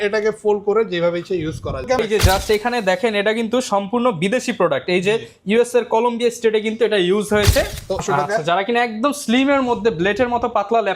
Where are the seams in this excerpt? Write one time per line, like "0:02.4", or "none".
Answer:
0:02.0
0:08.0